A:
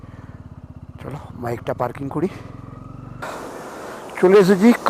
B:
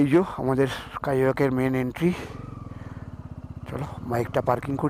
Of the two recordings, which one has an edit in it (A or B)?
A